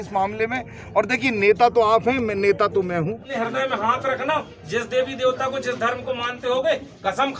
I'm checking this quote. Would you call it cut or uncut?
cut